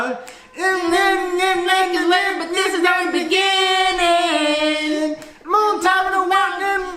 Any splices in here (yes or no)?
no